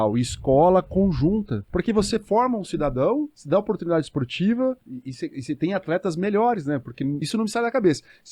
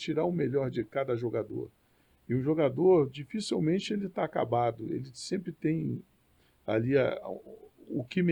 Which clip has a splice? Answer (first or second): first